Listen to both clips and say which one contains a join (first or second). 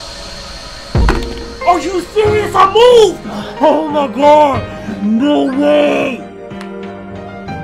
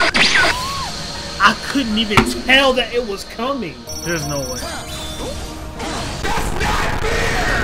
second